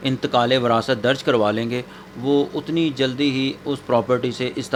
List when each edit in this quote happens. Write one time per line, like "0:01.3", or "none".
none